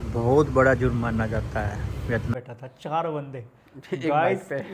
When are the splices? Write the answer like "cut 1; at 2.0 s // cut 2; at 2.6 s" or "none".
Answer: cut 1; at 2.3 s